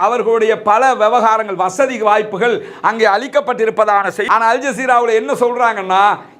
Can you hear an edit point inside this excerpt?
yes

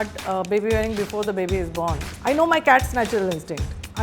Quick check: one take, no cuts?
no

